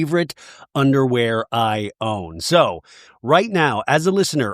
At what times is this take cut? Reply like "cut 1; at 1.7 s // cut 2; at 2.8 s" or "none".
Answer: cut 1; at 3.1 s

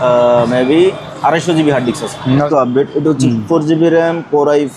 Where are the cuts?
cut 1; at 2.5 s

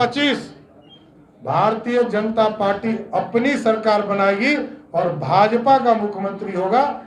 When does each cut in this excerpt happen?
none

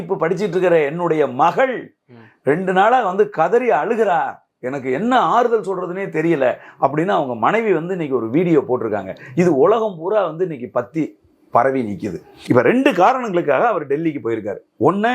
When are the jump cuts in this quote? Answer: cut 1; at 12.4 s

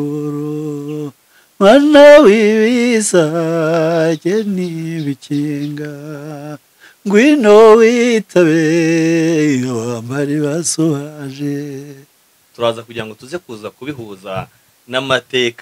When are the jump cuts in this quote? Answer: cut 1; at 12.5 s

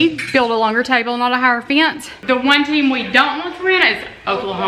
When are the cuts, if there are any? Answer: cut 1; at 2.2 s

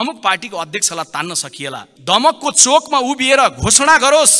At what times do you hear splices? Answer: cut 1; at 1.9 s

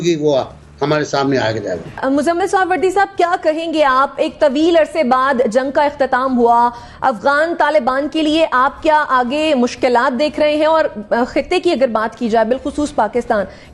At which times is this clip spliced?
none

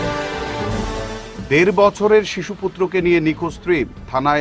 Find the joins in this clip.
cut 1; at 0.9 s

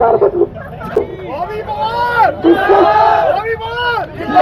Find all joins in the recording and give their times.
cut 1; at 1.0 s

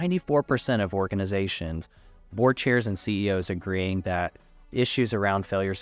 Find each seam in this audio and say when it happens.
none

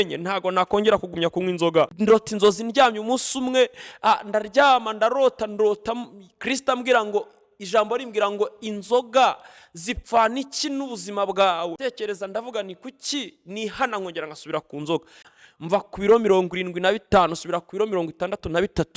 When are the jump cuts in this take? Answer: cut 1; at 1.9 s // cut 2; at 11.8 s // cut 3; at 15.4 s

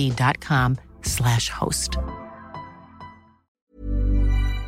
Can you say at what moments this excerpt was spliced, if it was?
cut 1; at 3.4 s

